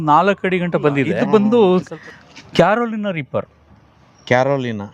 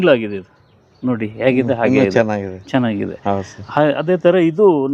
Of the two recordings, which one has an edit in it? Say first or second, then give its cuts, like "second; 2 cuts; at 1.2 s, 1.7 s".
first; 1 cut; at 1.2 s